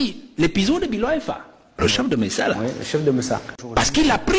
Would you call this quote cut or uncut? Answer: cut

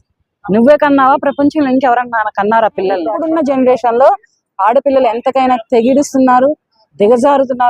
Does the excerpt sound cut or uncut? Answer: cut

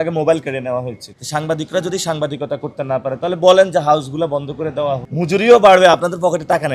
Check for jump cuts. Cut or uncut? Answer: cut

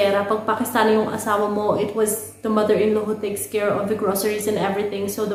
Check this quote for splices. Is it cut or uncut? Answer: uncut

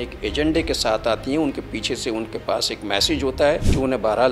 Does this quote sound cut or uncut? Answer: uncut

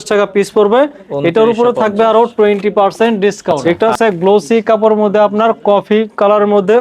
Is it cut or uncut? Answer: cut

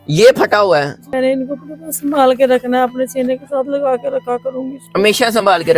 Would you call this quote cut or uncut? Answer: cut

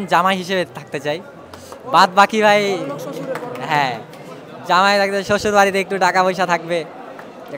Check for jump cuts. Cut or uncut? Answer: uncut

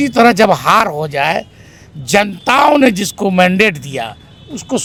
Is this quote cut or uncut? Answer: uncut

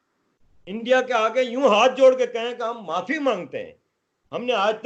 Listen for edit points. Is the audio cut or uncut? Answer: uncut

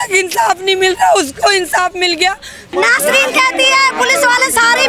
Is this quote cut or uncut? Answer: cut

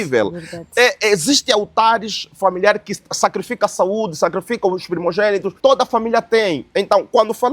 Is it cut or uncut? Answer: cut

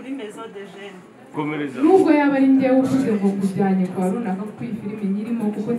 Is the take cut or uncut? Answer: cut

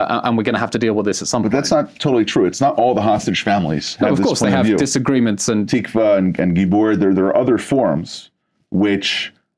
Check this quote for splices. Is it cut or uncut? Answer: uncut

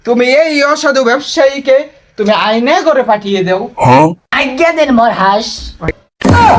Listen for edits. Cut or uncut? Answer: uncut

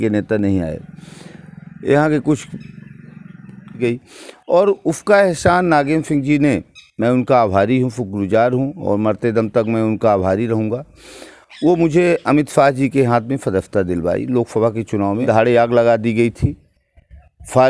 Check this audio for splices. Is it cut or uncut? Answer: cut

